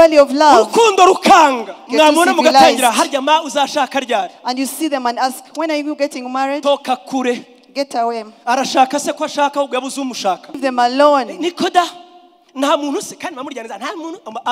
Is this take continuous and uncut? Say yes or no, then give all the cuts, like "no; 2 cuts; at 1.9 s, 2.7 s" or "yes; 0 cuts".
no; 2 cuts; at 1.8 s, 10.6 s